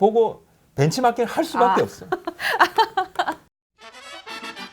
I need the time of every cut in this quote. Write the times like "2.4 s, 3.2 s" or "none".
3.4 s